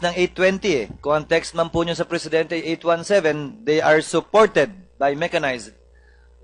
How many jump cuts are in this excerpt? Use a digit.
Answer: 1